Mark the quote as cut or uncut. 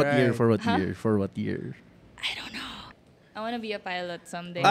cut